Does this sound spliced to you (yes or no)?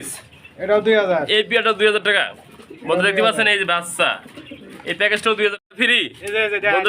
yes